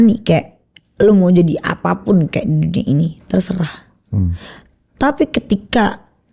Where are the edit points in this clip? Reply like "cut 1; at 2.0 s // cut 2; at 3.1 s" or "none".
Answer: none